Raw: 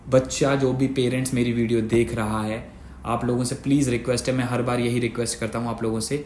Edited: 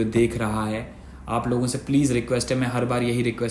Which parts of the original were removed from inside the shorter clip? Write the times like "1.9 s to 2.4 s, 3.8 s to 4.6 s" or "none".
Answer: none

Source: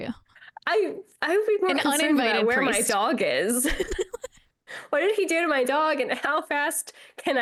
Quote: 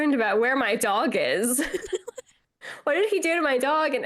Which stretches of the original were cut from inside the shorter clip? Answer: none

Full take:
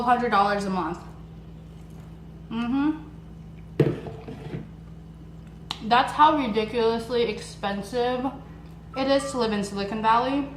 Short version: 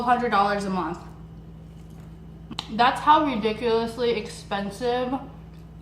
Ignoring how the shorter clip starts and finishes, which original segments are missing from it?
2.5 s to 5.6 s

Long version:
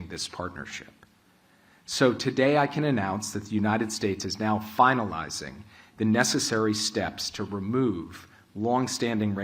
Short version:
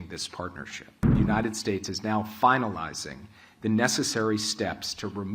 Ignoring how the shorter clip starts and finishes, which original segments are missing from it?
1.0 s to 3.4 s

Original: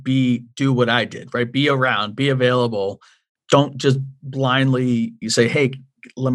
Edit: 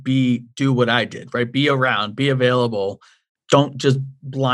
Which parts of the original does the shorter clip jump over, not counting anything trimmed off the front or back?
none

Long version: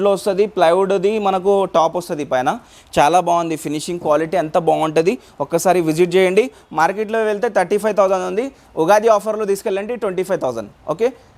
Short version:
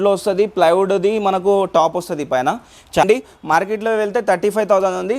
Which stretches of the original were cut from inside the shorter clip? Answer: 3.0 s to 6.3 s

